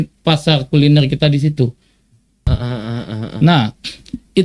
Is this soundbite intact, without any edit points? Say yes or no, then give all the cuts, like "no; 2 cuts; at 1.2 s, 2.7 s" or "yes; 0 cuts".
no; 1 cut; at 2.3 s